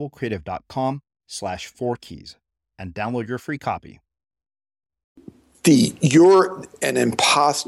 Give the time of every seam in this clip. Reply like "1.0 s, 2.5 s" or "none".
5.5 s